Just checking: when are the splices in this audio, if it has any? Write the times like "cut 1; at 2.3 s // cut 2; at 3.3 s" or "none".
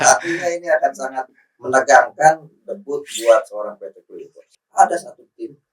cut 1; at 4.4 s